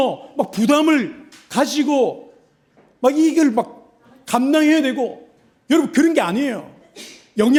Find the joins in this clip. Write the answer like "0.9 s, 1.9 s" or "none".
none

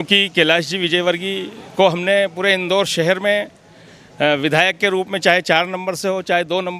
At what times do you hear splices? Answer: none

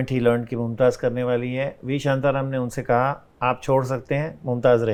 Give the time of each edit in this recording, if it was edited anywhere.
none

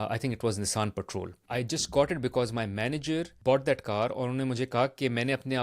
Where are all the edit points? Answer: 1.4 s, 3.3 s

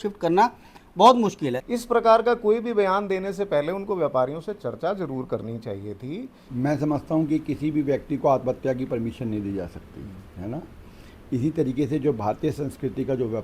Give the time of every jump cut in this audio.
1.5 s, 6.4 s

